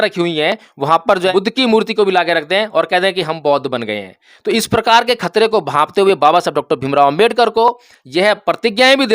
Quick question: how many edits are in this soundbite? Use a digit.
1